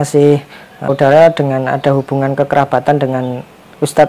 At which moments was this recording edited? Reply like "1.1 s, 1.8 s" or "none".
0.9 s